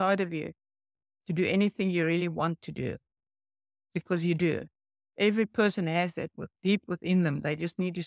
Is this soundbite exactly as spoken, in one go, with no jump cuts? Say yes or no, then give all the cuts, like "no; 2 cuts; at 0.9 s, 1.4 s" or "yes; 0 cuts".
yes; 0 cuts